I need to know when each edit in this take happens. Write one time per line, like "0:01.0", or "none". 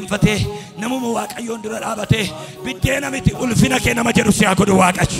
none